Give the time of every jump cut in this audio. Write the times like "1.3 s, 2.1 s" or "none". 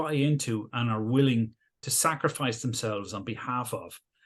none